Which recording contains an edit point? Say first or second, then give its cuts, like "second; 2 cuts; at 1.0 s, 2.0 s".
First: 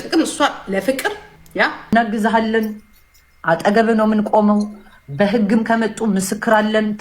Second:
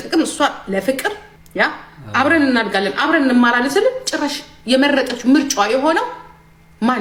first; 1 cut; at 1.8 s